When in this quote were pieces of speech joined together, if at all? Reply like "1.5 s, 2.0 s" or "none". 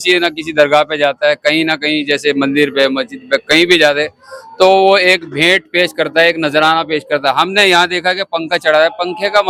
none